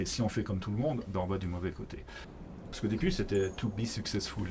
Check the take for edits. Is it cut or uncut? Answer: cut